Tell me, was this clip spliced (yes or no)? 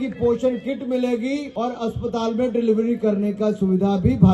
yes